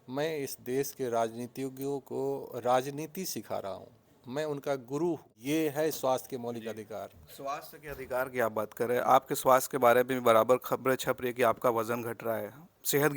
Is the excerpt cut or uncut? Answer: cut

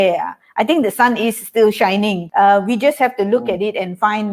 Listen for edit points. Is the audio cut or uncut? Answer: cut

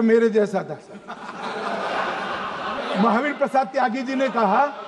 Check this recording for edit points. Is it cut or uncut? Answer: cut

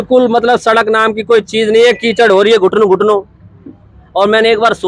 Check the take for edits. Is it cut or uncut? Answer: uncut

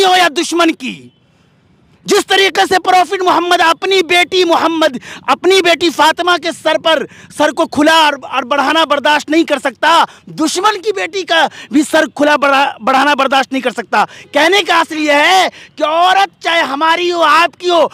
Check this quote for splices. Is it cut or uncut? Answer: uncut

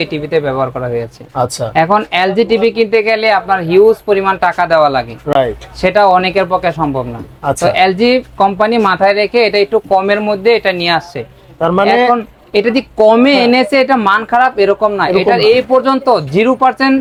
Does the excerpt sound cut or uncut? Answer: uncut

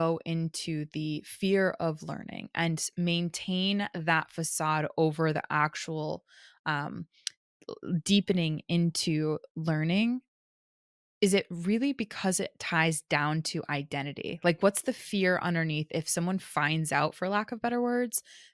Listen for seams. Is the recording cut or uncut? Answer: uncut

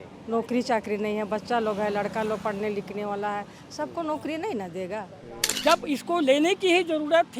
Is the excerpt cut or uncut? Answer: cut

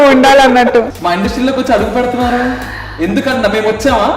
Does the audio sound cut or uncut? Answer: cut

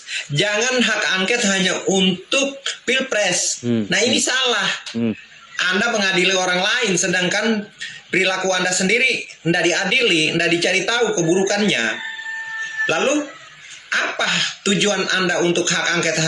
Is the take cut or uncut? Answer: uncut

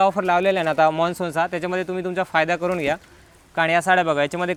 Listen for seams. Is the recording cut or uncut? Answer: uncut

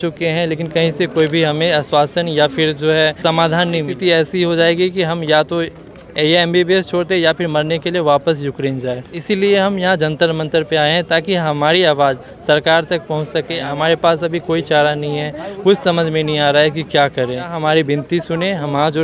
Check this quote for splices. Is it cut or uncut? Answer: cut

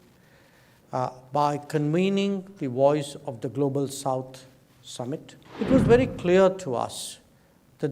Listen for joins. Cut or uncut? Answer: cut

